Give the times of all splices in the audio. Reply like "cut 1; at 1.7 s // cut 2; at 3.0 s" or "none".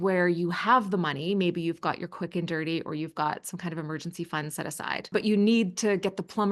cut 1; at 5.1 s